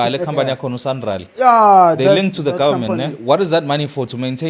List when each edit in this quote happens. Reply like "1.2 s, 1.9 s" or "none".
3.1 s